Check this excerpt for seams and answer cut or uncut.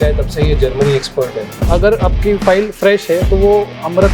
cut